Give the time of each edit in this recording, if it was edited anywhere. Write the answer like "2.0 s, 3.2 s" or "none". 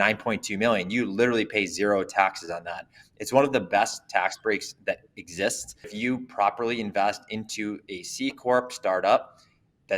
5.9 s